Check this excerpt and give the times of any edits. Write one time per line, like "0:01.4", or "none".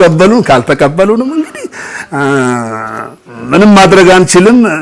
none